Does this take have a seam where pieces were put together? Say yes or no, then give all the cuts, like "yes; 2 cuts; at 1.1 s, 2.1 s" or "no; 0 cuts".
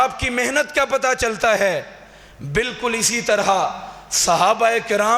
no; 0 cuts